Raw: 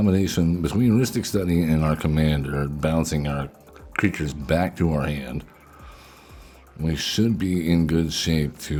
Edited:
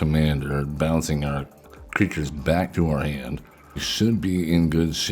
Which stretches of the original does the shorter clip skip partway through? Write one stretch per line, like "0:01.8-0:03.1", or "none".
0:05.9-0:07.0